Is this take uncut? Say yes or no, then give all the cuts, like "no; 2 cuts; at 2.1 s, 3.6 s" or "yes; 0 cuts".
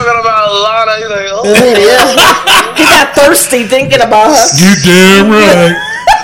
yes; 0 cuts